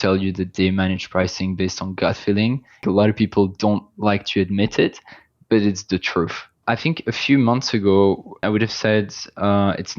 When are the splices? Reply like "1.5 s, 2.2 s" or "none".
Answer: 2.8 s, 6.6 s, 8.4 s